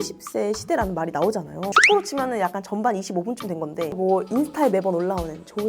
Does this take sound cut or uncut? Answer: cut